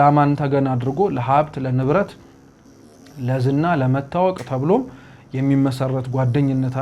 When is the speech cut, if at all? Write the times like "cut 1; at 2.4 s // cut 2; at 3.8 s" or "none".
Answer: none